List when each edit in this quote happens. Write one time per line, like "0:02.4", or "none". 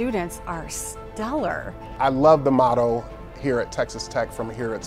0:01.9